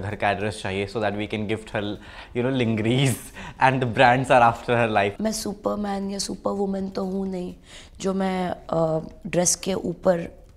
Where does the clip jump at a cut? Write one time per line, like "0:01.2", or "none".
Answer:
0:05.2